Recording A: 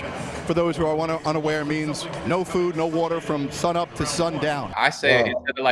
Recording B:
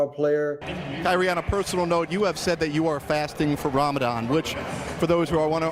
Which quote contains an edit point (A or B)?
A